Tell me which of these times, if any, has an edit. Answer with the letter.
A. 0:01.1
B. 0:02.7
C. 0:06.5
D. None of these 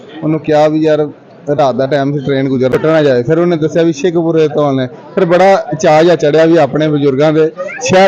B